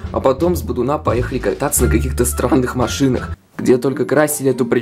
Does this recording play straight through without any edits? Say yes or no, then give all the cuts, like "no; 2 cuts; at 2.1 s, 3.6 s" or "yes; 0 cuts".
no; 1 cut; at 3.4 s